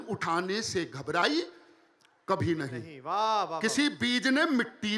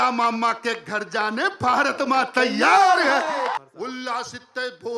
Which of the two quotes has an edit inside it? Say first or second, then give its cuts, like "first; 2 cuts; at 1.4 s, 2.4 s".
second; 1 cut; at 3.5 s